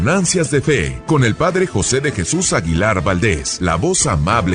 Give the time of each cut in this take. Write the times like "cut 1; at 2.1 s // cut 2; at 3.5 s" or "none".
cut 1; at 0.9 s // cut 2; at 3.5 s